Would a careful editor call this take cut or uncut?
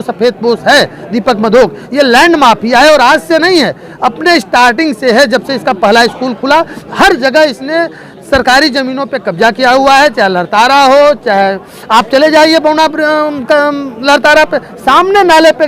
uncut